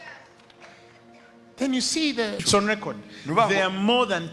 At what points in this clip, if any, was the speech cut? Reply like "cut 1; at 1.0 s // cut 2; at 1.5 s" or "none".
cut 1; at 2.4 s